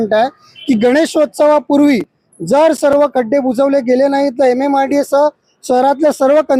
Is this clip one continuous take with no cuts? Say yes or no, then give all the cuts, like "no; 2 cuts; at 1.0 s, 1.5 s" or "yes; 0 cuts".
yes; 0 cuts